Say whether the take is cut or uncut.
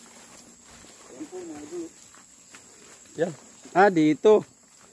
uncut